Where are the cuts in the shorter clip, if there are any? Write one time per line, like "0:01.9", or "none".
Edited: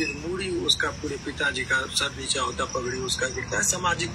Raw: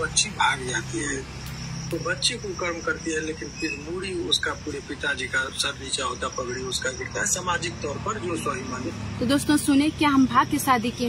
none